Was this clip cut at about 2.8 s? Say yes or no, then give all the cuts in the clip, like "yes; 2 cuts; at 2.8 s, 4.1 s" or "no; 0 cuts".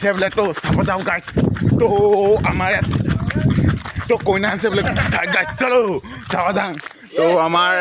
no; 1 cut; at 1.6 s